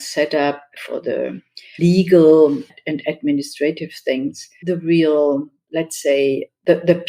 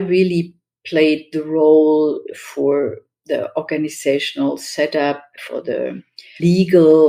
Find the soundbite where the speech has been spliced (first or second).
first